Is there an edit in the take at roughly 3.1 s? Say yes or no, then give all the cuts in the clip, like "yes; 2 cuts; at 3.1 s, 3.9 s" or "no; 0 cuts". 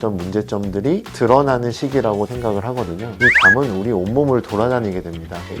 yes; 1 cut; at 3.1 s